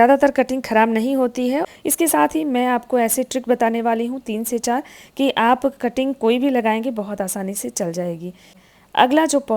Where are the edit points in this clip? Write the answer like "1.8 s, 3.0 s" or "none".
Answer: 1.6 s, 8.5 s